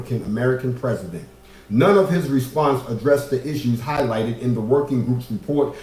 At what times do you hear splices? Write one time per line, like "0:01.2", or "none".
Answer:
none

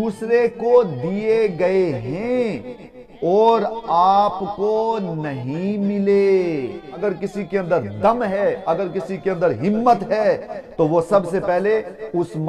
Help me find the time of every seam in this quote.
0:07.0

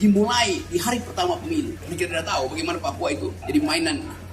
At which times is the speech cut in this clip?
0:01.8
0:03.4

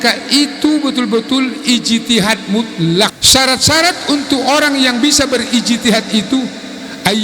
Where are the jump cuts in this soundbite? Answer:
0:03.2

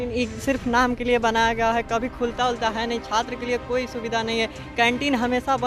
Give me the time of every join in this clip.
none

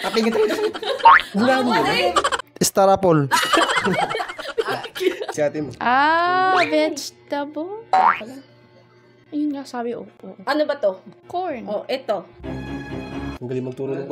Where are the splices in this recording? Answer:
0:02.4
0:05.3

